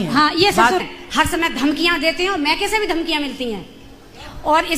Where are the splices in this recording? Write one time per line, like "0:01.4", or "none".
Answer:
0:00.9